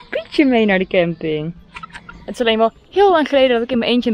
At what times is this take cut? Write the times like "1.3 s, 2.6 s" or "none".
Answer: 2.2 s